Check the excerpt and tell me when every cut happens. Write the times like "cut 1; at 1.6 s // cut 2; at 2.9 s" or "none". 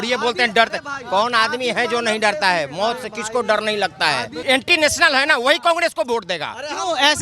cut 1; at 4.3 s

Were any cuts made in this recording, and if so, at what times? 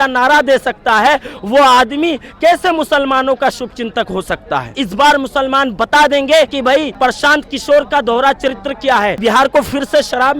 cut 1; at 4.7 s // cut 2; at 6.6 s // cut 3; at 9.2 s

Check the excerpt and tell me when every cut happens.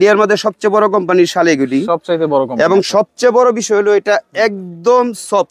none

